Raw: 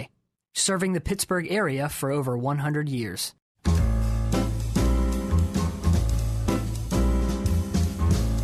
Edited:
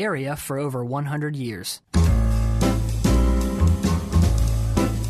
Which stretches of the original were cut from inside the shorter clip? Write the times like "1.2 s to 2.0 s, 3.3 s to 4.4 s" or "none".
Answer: 3.2 s to 3.4 s